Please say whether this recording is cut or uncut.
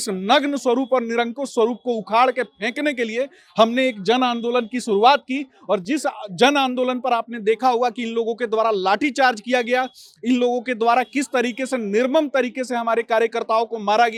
uncut